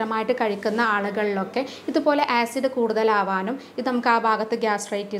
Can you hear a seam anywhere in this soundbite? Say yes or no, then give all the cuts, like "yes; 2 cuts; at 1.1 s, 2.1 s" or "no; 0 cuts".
no; 0 cuts